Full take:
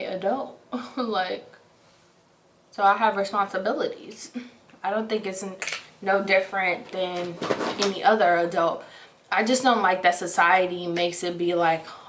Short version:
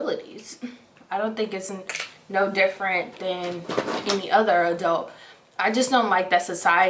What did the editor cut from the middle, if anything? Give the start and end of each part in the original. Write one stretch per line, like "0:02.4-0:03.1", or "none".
none